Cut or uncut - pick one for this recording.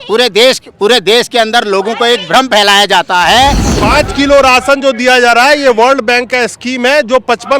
cut